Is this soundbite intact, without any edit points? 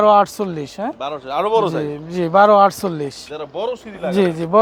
yes; 0 cuts

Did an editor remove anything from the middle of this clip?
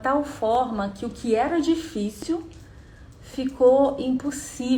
no; 0 cuts

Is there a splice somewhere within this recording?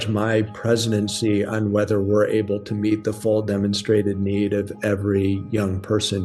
no; 0 cuts

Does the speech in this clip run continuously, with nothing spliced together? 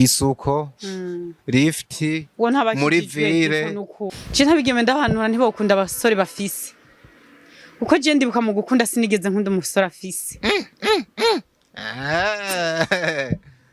no; 1 cut; at 4.0 s

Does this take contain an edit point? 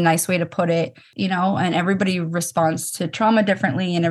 yes; 1 cut; at 1.0 s

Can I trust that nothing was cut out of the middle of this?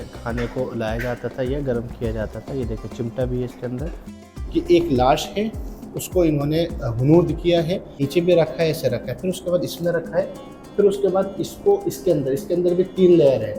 no; 2 cuts; at 4.3 s, 8.0 s

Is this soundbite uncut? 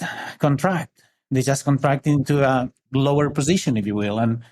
no; 1 cut; at 2.8 s

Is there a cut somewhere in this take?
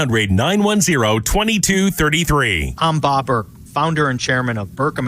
yes; 1 cut; at 2.6 s

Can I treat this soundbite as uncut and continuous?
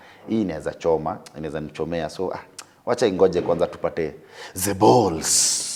yes; 0 cuts

